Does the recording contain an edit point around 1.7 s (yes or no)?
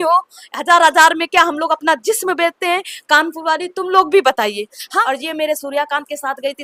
no